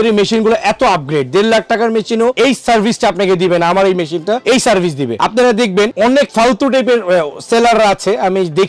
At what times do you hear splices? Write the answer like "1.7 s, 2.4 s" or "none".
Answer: none